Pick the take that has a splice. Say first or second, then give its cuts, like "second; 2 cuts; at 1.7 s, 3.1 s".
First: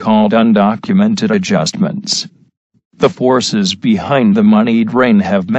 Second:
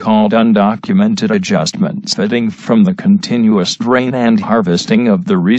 first; 1 cut; at 2.2 s